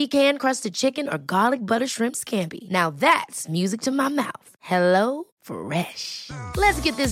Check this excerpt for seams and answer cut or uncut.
uncut